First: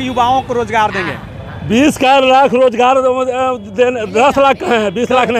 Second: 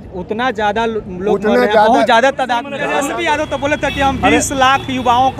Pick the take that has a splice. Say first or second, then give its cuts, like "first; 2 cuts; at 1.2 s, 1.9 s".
second; 1 cut; at 2.8 s